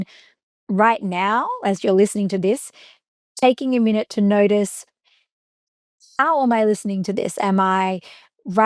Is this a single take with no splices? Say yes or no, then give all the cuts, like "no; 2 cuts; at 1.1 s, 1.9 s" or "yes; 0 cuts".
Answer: yes; 0 cuts